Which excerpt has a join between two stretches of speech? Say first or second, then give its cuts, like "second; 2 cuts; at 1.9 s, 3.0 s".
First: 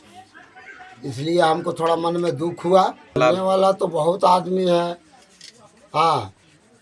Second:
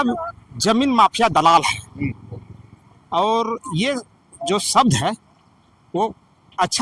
first; 1 cut; at 3.2 s